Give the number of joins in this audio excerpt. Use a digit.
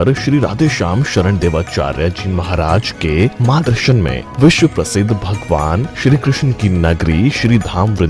1